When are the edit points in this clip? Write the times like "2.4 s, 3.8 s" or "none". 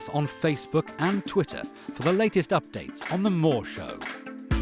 3.7 s

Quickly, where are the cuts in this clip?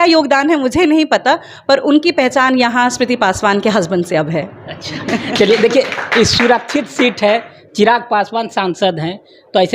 none

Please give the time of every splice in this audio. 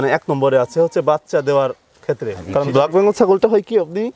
2.4 s

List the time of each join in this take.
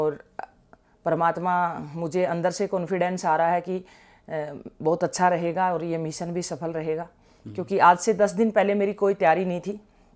none

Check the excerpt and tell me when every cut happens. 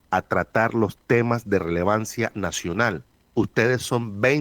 3.1 s

